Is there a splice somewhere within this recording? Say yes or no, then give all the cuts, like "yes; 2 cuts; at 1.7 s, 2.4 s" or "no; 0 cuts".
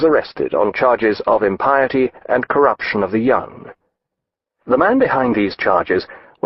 no; 0 cuts